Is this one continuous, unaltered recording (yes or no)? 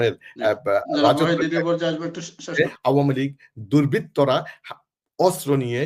no